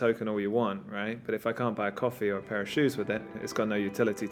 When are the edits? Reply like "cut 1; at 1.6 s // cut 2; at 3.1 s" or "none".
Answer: none

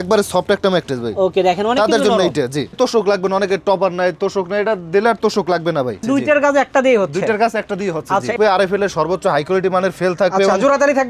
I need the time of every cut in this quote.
cut 1; at 2.8 s // cut 2; at 6.0 s // cut 3; at 8.3 s

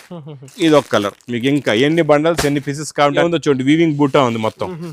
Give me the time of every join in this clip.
cut 1; at 3.2 s

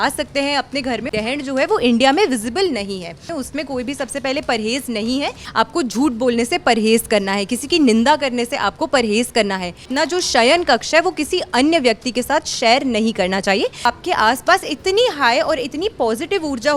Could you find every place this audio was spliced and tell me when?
cut 1; at 1.1 s // cut 2; at 3.3 s // cut 3; at 5.4 s // cut 4; at 9.8 s // cut 5; at 13.9 s

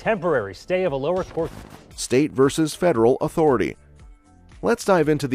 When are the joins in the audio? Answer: none

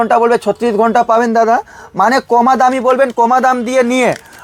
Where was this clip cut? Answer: none

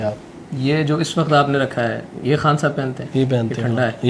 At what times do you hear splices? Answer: none

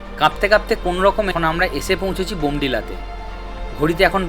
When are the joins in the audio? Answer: cut 1; at 1.3 s

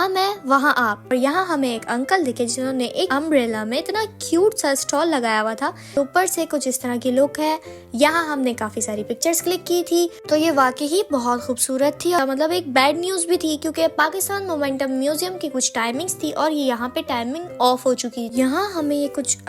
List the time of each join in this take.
cut 1; at 1.1 s // cut 2; at 6.0 s // cut 3; at 12.2 s // cut 4; at 18.2 s

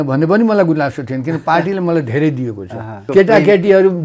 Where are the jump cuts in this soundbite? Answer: cut 1; at 3.0 s

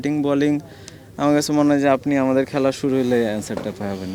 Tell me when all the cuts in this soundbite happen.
none

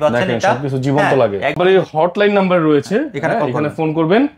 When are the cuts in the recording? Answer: cut 1; at 1.6 s

